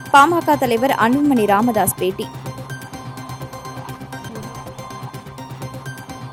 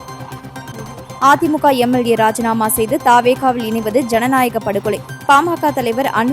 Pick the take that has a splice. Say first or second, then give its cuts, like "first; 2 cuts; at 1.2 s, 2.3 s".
second; 1 cut; at 1.1 s